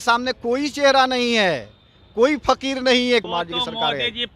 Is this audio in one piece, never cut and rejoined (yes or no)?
no